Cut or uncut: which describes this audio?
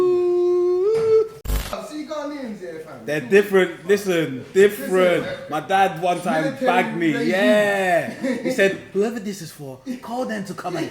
cut